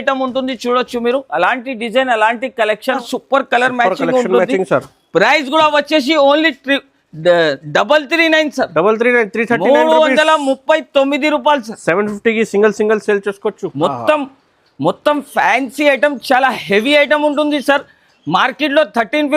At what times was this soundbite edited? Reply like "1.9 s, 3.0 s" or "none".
3.0 s, 13.6 s